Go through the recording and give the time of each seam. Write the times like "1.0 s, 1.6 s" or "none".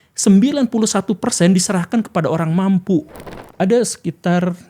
3.2 s